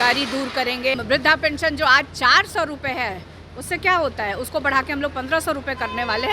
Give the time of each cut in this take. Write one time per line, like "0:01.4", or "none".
0:01.0